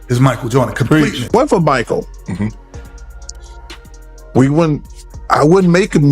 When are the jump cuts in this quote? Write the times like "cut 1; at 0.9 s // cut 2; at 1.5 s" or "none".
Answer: cut 1; at 1.2 s